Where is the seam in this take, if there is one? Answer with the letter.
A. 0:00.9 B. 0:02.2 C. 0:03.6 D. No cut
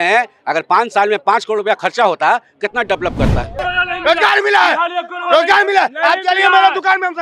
C